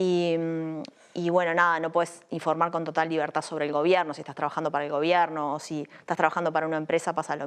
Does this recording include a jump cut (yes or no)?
no